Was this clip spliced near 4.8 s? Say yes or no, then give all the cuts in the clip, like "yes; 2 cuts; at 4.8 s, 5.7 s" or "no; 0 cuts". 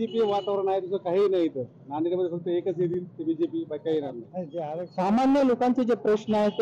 yes; 1 cut; at 4.8 s